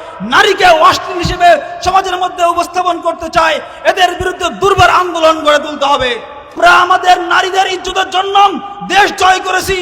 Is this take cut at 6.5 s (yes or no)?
yes